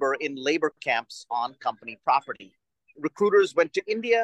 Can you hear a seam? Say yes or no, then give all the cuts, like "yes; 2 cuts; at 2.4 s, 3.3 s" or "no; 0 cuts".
yes; 1 cut; at 2.9 s